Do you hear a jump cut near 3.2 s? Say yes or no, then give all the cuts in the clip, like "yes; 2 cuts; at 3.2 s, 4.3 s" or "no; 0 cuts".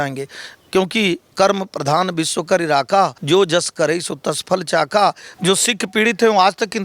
yes; 2 cuts; at 3.2 s, 5.3 s